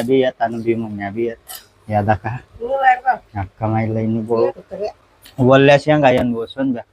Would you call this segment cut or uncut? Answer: cut